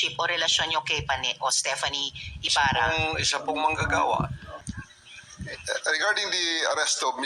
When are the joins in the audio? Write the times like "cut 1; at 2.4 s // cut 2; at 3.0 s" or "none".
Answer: cut 1; at 4.7 s